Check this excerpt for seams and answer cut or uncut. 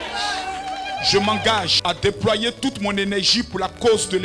cut